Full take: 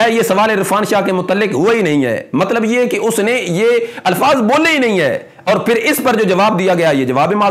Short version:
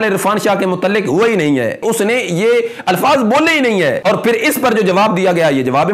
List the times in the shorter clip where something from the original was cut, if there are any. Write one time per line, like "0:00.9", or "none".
0:01.8
0:04.0